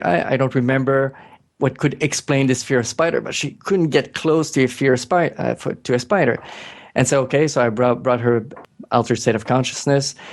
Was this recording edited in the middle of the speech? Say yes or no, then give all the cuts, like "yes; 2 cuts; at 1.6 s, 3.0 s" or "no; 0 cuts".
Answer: yes; 2 cuts; at 1.3 s, 8.6 s